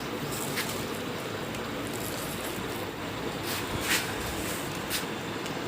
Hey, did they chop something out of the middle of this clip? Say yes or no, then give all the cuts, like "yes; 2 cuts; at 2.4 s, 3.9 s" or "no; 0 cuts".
yes; 1 cut; at 2.9 s